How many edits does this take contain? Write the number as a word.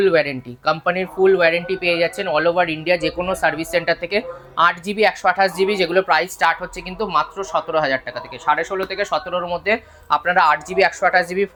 zero